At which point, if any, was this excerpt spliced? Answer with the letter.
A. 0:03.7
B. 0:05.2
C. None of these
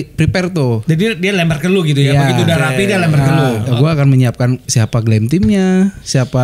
A